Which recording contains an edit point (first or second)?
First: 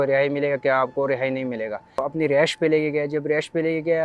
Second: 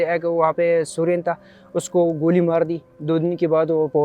first